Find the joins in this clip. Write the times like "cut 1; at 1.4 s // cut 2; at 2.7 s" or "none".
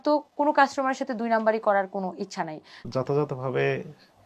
cut 1; at 2.8 s